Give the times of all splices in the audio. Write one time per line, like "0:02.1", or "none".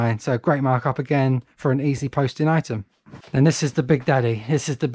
none

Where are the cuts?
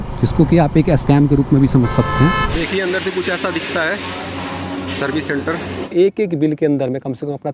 0:02.5
0:05.8

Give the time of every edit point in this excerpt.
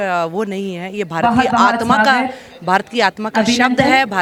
none

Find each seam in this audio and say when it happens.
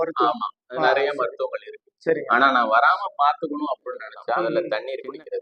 0:04.4

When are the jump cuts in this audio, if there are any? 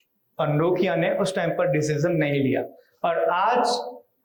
none

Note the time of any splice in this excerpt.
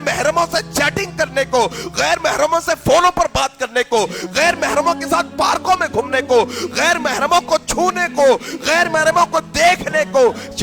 none

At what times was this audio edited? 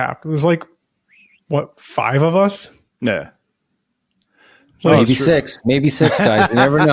none

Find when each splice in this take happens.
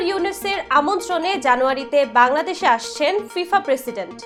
none

